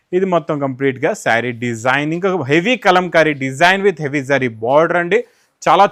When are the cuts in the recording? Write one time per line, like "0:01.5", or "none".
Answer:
none